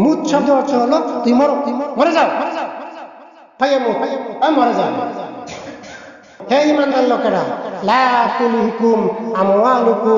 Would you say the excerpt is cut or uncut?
cut